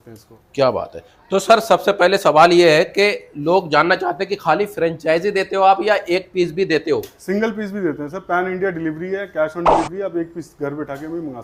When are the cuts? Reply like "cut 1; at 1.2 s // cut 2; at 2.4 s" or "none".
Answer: none